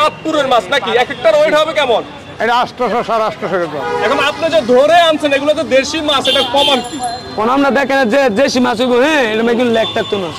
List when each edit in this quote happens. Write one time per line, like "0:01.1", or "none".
0:03.8